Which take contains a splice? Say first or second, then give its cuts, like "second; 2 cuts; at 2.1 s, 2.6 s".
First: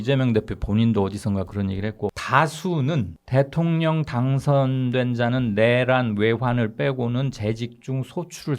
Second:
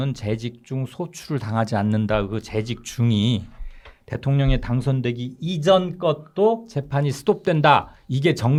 first; 2 cuts; at 2.2 s, 3.2 s